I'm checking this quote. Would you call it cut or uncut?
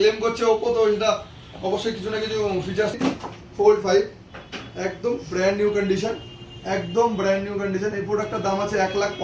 cut